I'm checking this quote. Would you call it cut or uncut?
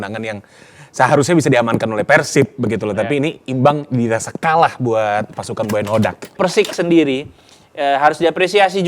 cut